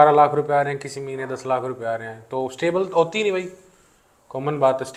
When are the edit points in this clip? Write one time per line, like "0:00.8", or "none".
none